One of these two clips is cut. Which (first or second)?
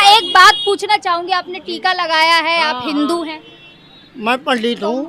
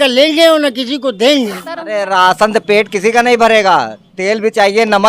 second